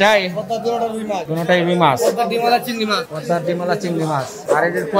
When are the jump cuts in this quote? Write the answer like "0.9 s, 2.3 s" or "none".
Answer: none